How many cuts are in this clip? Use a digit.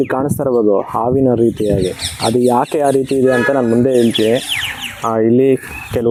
0